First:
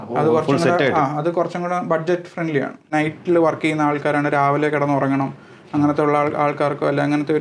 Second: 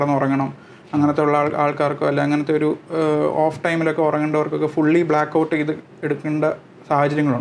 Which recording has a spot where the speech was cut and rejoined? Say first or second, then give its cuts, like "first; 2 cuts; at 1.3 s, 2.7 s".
first; 1 cut; at 2.9 s